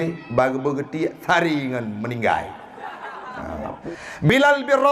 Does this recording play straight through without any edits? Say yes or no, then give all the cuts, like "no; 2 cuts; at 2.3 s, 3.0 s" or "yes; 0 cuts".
no; 1 cut; at 3.8 s